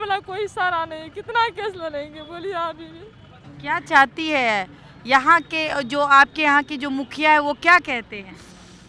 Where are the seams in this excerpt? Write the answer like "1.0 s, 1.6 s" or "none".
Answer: none

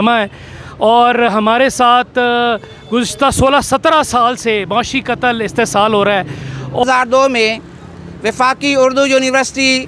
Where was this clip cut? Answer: 6.8 s

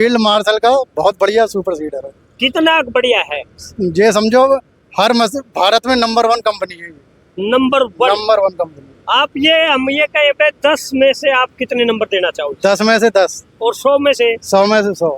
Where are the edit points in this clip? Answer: none

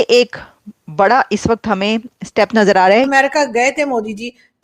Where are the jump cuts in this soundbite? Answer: 3.1 s

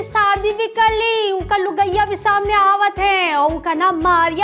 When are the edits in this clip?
none

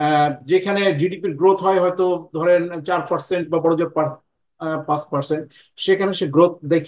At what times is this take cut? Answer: none

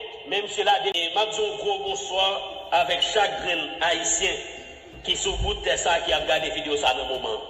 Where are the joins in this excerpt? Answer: 1.0 s

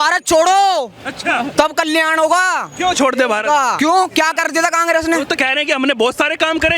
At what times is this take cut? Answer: 3.8 s, 5.3 s

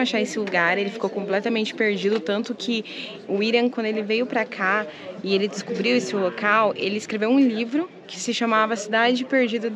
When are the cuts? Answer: none

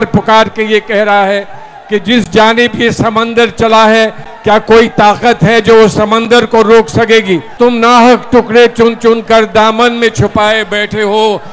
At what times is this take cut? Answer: 7.5 s

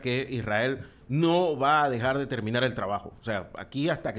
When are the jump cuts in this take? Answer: none

